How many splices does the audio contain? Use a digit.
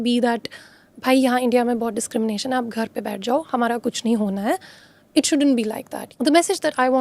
1